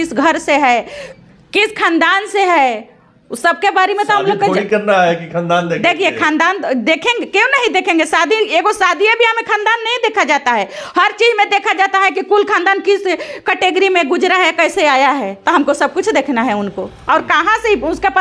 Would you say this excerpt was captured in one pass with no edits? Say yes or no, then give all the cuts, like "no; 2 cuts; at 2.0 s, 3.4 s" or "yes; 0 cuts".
yes; 0 cuts